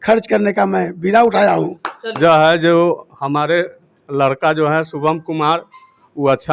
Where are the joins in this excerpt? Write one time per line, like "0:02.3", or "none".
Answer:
0:02.2